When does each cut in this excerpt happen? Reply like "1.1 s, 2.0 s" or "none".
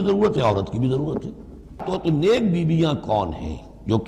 1.8 s